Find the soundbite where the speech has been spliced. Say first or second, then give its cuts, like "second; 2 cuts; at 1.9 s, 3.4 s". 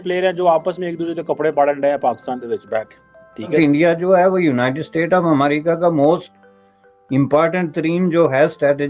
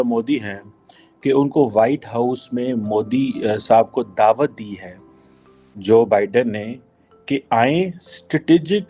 first; 1 cut; at 3.5 s